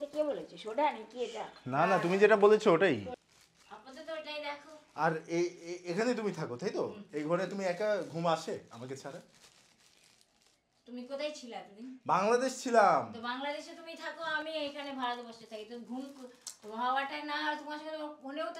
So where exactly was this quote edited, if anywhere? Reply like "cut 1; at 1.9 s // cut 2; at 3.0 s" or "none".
cut 1; at 3.2 s